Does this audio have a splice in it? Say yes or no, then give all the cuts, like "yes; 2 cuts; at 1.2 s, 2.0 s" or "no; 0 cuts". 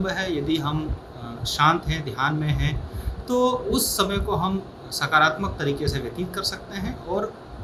no; 0 cuts